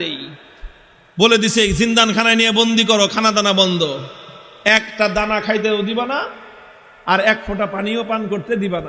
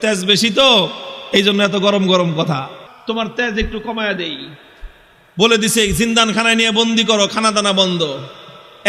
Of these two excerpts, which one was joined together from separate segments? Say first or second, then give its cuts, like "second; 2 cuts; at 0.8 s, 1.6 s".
second; 1 cut; at 2.8 s